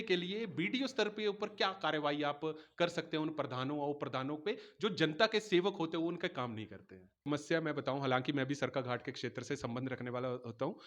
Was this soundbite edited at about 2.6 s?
no; 1 cut; at 7.3 s

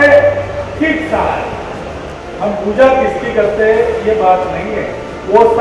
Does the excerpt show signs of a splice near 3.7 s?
no; 1 cut; at 2.1 s

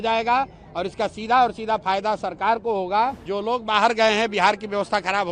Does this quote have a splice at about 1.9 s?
no; 1 cut; at 3.3 s

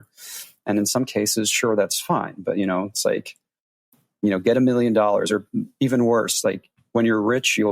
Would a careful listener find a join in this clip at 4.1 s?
no; 0 cuts

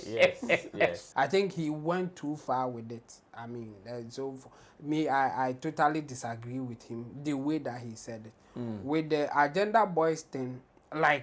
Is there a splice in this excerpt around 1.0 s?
yes; 1 cut; at 1.0 s

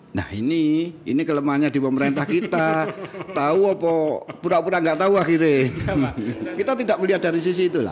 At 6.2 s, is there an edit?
yes; 1 cut; at 6.2 s

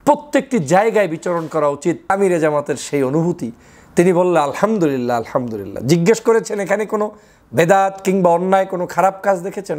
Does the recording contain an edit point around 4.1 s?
no; 1 cut; at 2.1 s

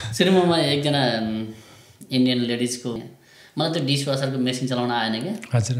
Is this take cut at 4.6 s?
no; 1 cut; at 2.9 s

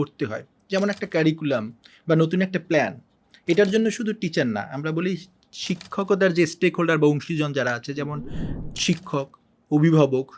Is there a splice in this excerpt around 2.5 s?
no; 1 cut; at 8.6 s

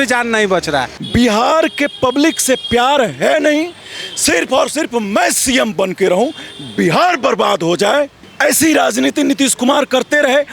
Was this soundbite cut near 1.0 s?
yes; 2 cuts; at 1.0 s, 8.2 s

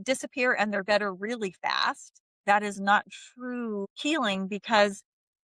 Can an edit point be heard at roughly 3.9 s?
yes; 1 cut; at 3.9 s

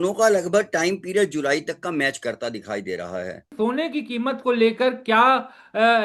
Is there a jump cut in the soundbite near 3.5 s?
yes; 1 cut; at 3.5 s

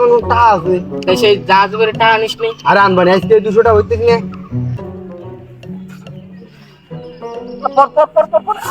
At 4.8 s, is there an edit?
yes; 1 cut; at 4.8 s

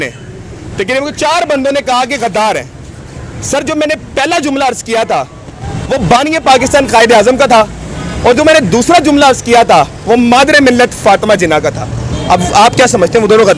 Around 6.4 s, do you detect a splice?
no; 0 cuts

